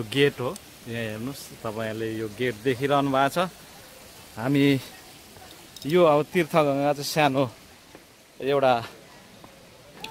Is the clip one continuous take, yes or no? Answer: yes